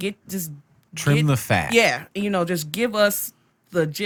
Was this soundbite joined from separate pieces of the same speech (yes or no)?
no